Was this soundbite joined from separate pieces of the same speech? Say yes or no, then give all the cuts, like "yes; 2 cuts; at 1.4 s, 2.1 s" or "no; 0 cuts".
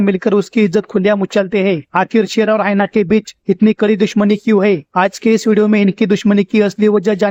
no; 0 cuts